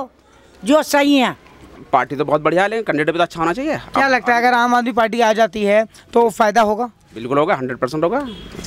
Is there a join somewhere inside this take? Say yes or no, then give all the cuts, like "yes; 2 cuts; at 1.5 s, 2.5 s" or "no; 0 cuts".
yes; 1 cut; at 1.7 s